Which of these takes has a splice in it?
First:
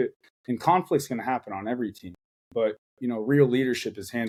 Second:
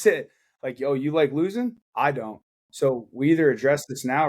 second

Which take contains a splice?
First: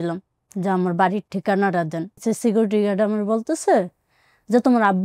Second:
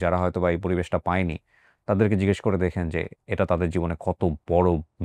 first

